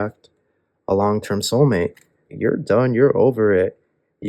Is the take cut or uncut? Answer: cut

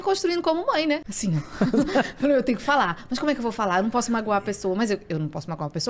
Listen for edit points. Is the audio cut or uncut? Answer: cut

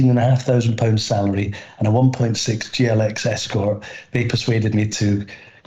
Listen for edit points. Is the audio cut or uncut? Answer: uncut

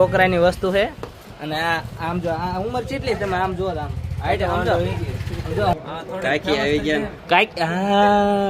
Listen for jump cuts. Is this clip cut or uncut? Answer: cut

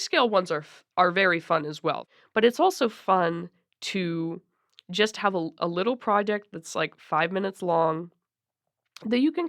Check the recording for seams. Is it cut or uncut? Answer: cut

